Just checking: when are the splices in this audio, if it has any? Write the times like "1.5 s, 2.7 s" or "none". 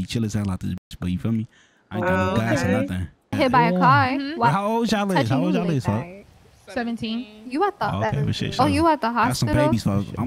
3.3 s